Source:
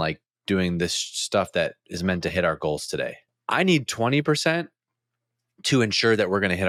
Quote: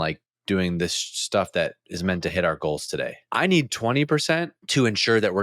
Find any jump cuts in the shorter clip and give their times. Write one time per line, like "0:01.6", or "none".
0:03.2
0:04.6